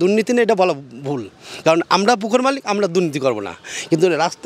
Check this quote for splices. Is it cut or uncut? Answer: uncut